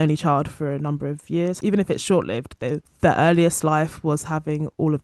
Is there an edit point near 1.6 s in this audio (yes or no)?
yes